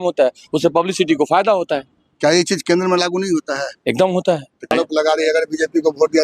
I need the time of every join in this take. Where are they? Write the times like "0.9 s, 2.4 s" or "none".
4.7 s